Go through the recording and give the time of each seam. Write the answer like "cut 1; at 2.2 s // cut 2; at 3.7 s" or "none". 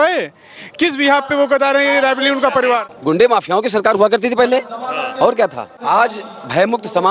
cut 1; at 2.8 s // cut 2; at 5.7 s